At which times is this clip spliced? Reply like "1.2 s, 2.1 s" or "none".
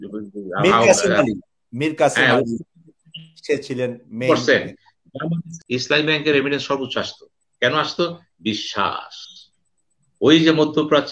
5.5 s